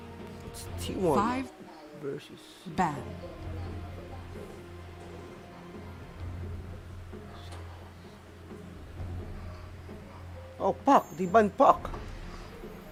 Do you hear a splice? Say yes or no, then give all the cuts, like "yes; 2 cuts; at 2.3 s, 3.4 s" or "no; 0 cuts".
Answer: no; 0 cuts